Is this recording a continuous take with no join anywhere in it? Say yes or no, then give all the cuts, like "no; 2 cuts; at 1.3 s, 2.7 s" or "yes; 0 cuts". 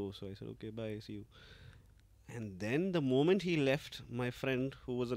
yes; 0 cuts